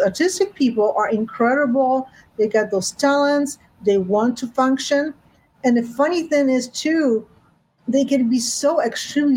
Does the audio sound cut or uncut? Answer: uncut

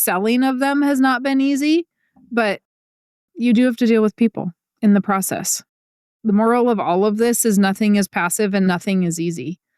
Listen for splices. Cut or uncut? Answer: cut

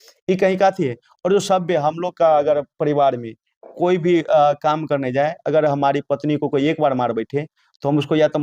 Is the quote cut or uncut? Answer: uncut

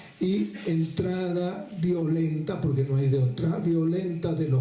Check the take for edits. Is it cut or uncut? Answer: cut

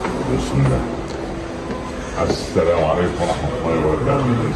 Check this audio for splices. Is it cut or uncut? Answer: uncut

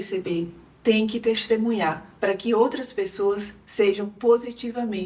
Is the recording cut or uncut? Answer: uncut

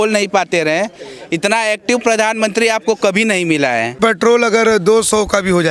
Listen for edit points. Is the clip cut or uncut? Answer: cut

